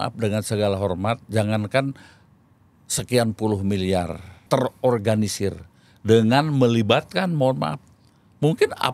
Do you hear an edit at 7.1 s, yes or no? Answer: no